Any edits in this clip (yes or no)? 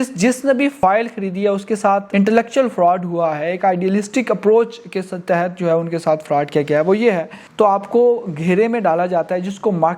yes